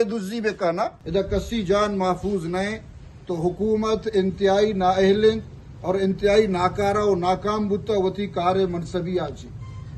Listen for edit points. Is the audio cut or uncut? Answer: cut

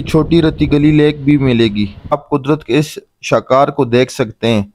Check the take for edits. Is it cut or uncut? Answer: cut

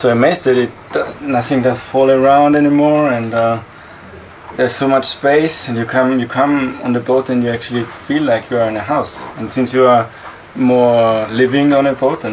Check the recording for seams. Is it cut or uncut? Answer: uncut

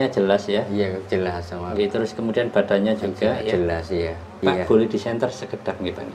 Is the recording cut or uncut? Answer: cut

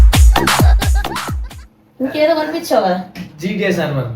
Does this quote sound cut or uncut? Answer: uncut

